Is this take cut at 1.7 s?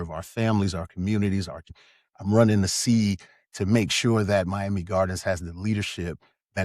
yes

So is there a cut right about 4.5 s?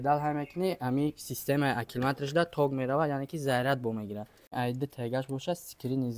yes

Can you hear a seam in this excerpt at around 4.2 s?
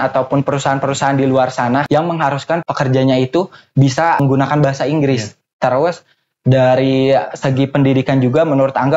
yes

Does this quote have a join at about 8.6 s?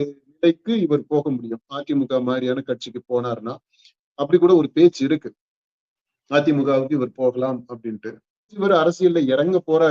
yes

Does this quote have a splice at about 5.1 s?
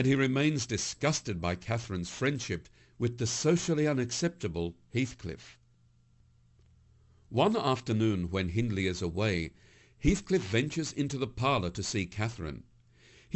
yes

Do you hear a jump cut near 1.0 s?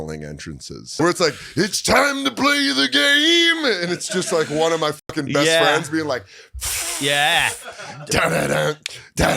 yes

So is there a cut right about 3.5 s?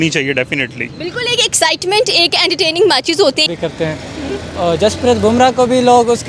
yes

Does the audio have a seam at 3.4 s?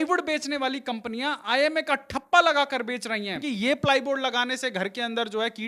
yes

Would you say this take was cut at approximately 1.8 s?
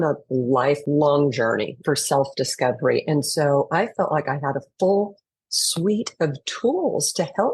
yes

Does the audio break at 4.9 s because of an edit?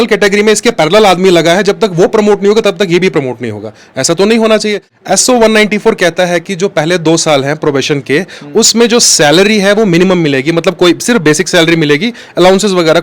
yes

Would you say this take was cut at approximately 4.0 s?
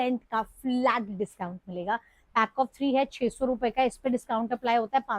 no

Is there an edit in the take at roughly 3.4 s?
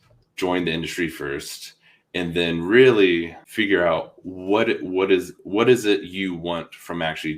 yes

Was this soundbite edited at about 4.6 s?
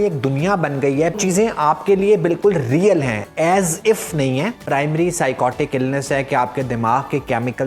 yes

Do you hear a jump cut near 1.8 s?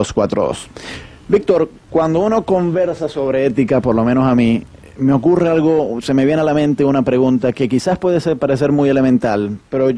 yes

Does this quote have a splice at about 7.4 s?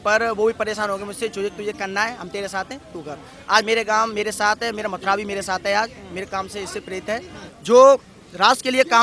yes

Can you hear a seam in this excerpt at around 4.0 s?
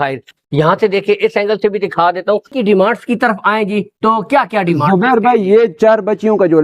no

